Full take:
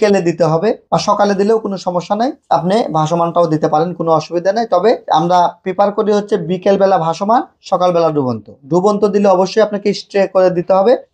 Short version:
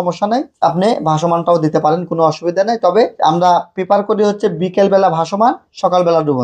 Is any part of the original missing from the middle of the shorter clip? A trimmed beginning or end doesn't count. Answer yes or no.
no